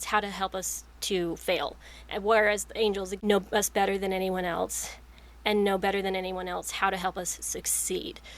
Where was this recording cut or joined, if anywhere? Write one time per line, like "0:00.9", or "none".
0:03.1